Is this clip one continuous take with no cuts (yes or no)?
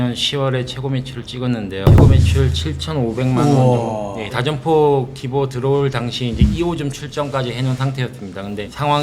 no